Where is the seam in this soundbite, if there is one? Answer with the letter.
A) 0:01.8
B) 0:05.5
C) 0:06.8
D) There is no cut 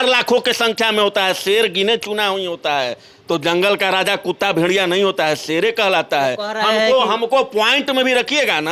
D